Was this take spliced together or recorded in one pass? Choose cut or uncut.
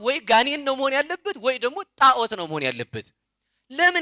uncut